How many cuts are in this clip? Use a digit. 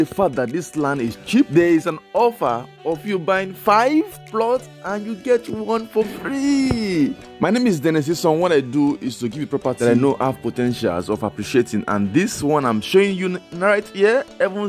3